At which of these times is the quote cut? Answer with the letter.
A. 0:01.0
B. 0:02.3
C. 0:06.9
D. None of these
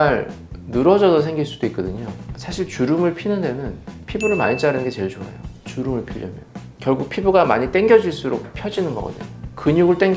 B